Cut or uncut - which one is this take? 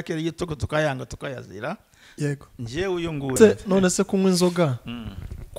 cut